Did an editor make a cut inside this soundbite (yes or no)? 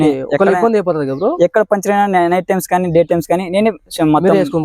no